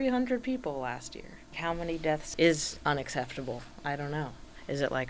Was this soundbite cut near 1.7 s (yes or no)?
yes